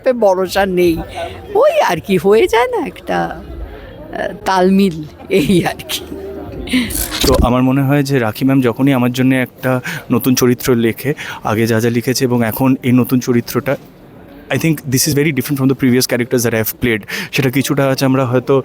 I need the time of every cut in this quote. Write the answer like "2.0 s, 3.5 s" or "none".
7.1 s